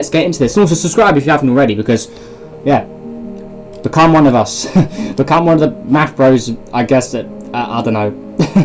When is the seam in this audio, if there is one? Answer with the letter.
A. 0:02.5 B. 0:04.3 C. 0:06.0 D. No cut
D